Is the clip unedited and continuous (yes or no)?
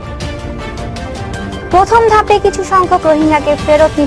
no